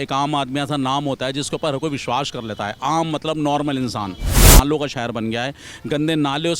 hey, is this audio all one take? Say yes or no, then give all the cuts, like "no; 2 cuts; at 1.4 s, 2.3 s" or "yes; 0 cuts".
no; 1 cut; at 4.4 s